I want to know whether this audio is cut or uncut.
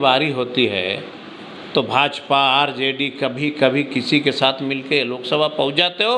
uncut